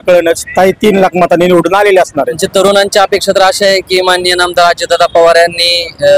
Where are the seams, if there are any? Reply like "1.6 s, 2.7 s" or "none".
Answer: 2.4 s